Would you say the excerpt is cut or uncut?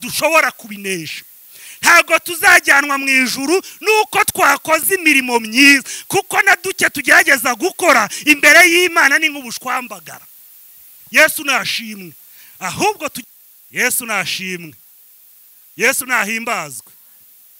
cut